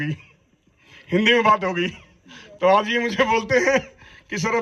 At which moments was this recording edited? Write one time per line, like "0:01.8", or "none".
none